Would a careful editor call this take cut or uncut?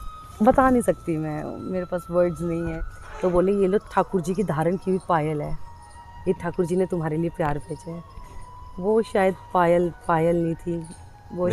cut